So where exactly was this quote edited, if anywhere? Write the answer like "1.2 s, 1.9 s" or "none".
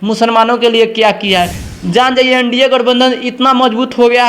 1.6 s